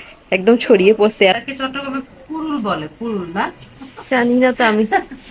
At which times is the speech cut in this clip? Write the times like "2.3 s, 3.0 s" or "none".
1.1 s